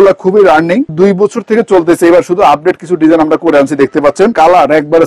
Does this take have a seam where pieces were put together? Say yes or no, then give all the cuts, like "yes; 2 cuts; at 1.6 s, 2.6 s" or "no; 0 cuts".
yes; 2 cuts; at 0.9 s, 4.3 s